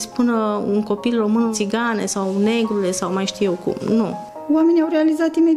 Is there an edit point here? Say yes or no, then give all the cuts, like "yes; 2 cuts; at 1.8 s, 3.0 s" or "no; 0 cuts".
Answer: yes; 2 cuts; at 1.5 s, 4.2 s